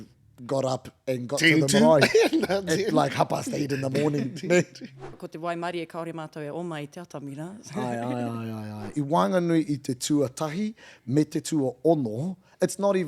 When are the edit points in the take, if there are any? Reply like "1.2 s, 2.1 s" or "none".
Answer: 5.2 s, 8.9 s